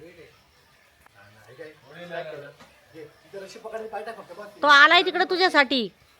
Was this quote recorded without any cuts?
no; 1 cut; at 0.9 s

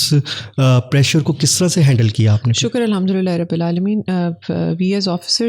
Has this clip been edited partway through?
no; 0 cuts

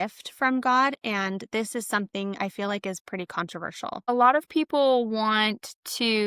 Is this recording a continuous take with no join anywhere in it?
no; 1 cut; at 4.0 s

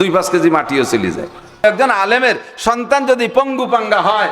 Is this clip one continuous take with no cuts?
no; 1 cut; at 1.6 s

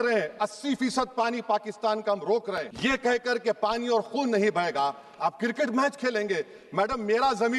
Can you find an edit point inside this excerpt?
no; 0 cuts

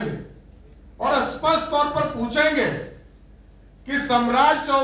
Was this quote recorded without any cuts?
yes; 0 cuts

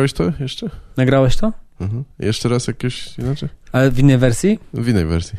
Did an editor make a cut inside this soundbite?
no; 0 cuts

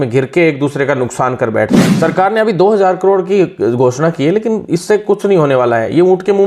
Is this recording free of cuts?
no; 1 cut; at 1.8 s

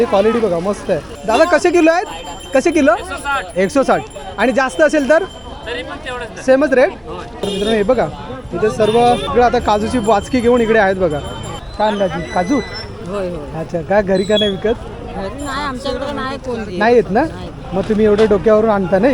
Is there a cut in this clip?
yes; 3 cuts; at 1.1 s, 7.4 s, 11.6 s

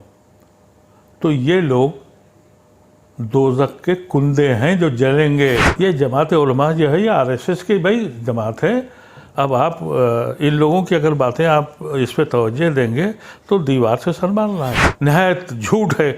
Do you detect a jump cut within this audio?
yes; 2 cuts; at 5.7 s, 14.8 s

